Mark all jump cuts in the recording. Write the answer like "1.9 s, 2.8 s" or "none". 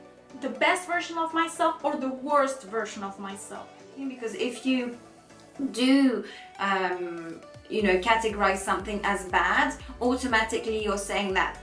4.0 s